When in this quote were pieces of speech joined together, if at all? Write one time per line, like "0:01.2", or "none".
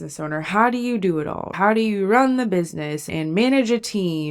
none

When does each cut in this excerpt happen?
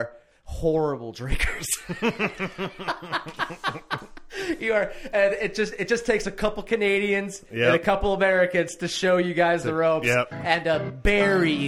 none

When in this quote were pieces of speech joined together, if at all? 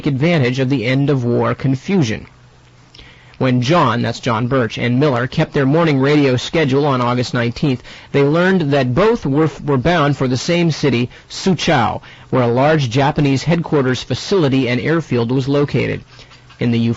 0:13.7

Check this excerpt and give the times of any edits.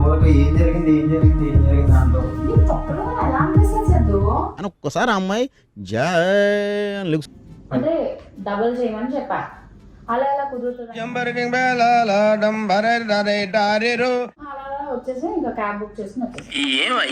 0:07.3

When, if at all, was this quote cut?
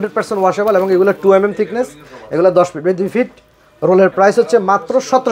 none

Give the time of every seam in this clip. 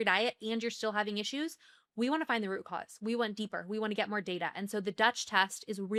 none

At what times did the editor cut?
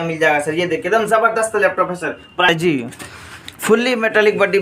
0:02.5

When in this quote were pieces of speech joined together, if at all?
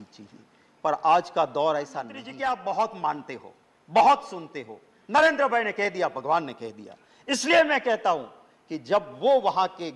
0:02.2

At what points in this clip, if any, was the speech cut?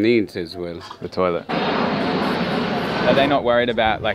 0:01.7
0:03.0

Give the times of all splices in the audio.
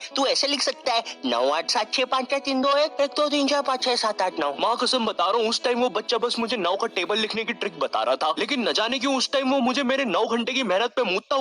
0:00.9

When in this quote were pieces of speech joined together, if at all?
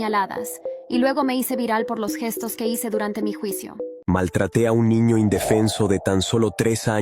0:03.9

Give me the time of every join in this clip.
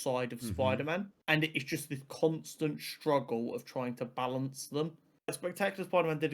0:01.1
0:05.4

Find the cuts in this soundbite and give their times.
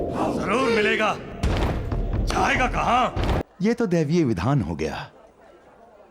0:03.4

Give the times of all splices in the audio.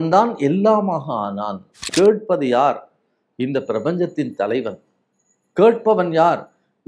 0:01.7

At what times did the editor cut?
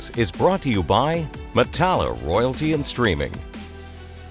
0:03.3

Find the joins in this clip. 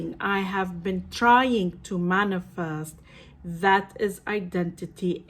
none

